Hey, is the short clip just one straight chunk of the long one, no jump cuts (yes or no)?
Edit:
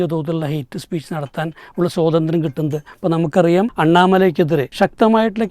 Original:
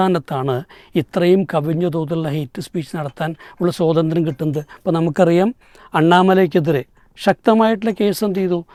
no